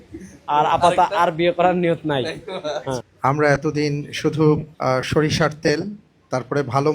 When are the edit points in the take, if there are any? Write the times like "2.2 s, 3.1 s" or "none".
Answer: 3.1 s, 4.7 s